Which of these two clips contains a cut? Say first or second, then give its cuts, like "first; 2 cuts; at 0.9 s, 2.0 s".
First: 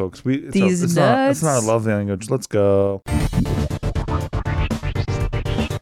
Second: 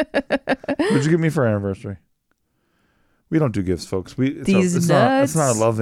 first; 1 cut; at 3.0 s